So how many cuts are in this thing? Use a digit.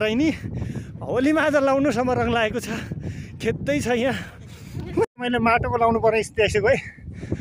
0